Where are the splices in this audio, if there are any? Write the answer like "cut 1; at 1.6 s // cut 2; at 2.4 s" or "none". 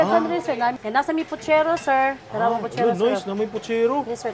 cut 1; at 0.8 s // cut 2; at 2.2 s

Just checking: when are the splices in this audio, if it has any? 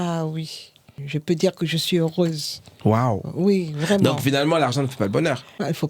cut 1; at 1.0 s

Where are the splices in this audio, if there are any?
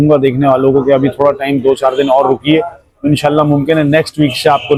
none

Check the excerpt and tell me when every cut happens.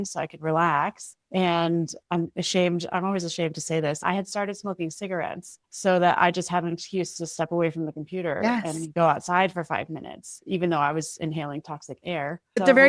none

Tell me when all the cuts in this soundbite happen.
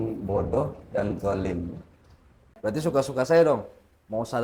cut 1; at 2.4 s

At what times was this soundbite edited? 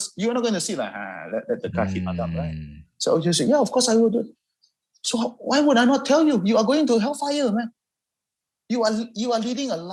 none

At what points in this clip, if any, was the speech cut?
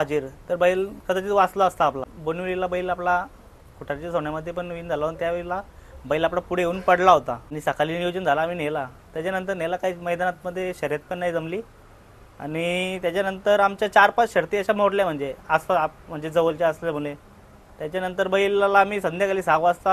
cut 1; at 2.1 s // cut 2; at 7.4 s

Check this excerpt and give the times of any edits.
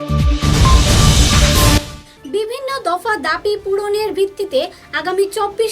cut 1; at 1.8 s

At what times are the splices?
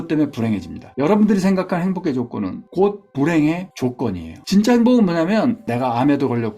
cut 1; at 4.3 s

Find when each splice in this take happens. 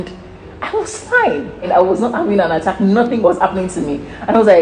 cut 1; at 1.7 s // cut 2; at 3.2 s

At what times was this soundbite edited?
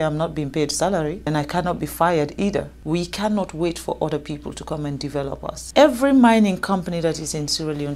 cut 1; at 1.3 s // cut 2; at 2.8 s // cut 3; at 5.6 s

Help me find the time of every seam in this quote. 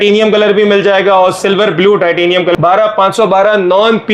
cut 1; at 2.5 s

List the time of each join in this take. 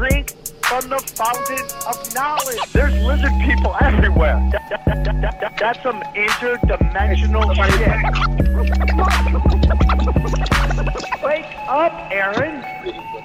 cut 1; at 2.0 s

